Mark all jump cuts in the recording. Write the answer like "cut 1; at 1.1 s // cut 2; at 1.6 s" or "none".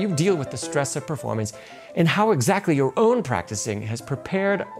none